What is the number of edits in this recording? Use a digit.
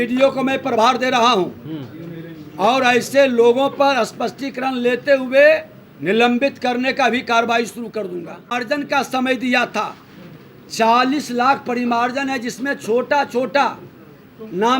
1